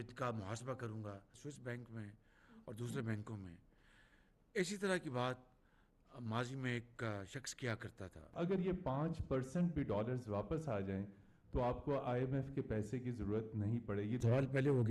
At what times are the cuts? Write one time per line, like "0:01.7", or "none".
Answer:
0:01.4
0:08.4
0:14.2